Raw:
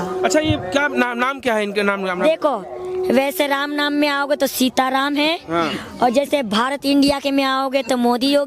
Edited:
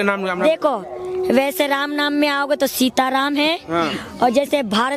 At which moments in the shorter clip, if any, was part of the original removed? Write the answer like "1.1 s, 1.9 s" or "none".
none